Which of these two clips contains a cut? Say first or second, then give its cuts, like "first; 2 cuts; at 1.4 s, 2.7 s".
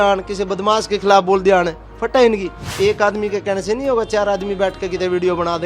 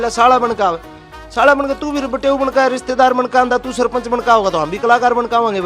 first; 1 cut; at 2.6 s